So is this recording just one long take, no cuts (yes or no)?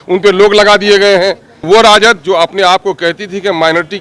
no